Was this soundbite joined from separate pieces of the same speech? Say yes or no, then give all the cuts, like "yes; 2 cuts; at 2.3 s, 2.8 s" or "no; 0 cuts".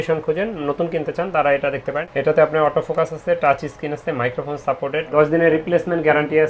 yes; 2 cuts; at 2.0 s, 5.1 s